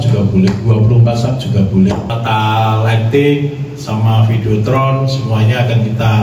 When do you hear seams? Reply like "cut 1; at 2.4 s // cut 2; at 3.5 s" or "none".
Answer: cut 1; at 2.1 s